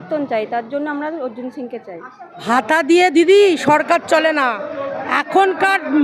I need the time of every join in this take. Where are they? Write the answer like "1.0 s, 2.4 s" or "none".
2.4 s